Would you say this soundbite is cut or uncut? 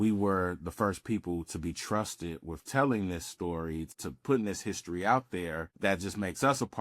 cut